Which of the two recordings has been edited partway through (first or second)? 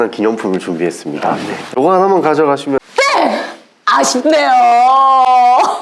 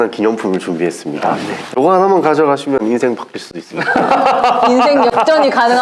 first